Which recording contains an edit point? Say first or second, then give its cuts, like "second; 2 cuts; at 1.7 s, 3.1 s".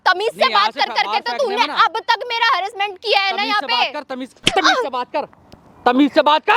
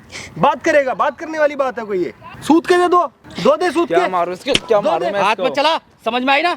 second; 2 cuts; at 2.3 s, 3.2 s